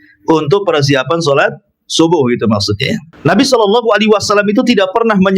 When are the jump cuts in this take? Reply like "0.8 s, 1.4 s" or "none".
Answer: 3.0 s